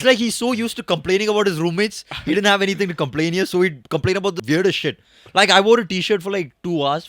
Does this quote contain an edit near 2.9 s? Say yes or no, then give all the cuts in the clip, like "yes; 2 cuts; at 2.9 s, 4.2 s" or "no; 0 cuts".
no; 1 cut; at 4.4 s